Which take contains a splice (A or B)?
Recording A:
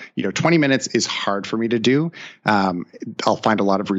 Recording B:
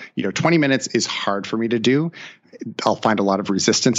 B